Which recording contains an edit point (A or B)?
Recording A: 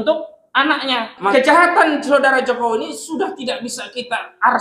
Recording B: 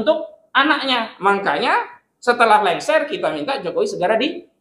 A